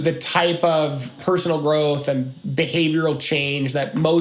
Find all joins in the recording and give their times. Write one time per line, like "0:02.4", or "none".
0:01.2